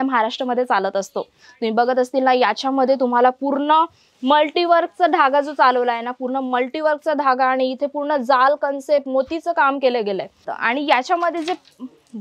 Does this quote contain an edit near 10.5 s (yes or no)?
yes